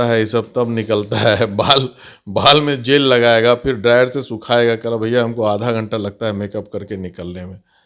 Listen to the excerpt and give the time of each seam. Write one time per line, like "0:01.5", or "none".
none